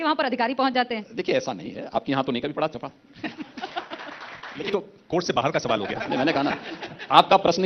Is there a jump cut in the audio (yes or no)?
yes